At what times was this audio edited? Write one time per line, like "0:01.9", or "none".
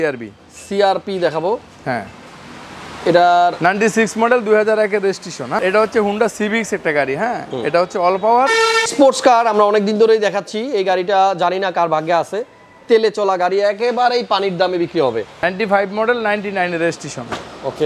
0:05.6
0:08.9
0:15.3